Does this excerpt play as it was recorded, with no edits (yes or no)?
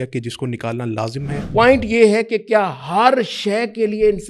no